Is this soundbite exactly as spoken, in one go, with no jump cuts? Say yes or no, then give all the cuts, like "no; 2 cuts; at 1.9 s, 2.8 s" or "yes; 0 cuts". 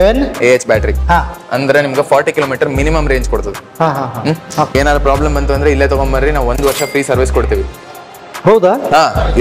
no; 1 cut; at 4.7 s